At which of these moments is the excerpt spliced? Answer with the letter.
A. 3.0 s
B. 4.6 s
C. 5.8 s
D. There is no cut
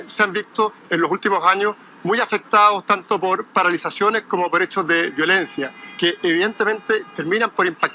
D